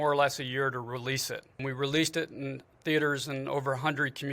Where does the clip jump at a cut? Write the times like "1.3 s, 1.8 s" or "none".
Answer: 1.6 s